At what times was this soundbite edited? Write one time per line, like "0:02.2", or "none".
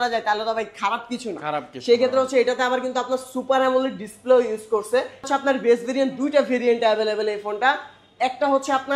0:05.3